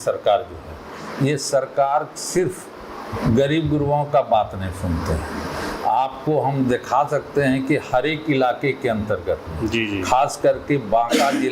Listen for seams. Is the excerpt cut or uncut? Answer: uncut